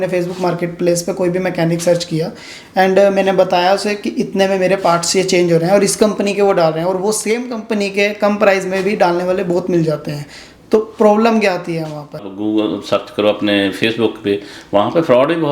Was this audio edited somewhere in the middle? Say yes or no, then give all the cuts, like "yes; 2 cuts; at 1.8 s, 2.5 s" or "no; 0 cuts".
yes; 1 cut; at 12.3 s